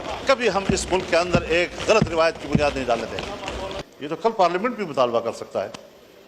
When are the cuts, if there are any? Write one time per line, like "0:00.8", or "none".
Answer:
0:03.7